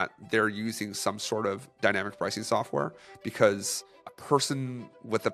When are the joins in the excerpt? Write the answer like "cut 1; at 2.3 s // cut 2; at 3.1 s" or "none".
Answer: none